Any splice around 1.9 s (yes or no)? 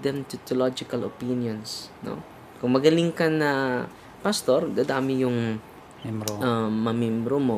no